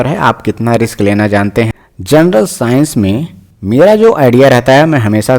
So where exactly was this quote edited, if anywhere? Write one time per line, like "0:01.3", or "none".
0:01.7